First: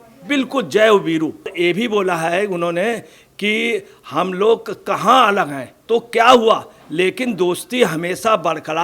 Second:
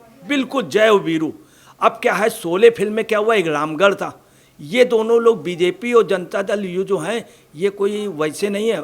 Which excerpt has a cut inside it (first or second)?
first